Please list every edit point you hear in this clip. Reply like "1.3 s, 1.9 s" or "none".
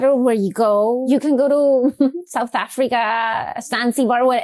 1.1 s